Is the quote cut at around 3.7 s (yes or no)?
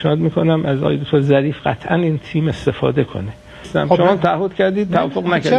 yes